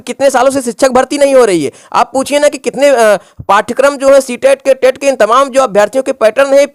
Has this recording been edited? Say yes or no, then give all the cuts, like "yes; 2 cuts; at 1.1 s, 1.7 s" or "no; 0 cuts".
no; 0 cuts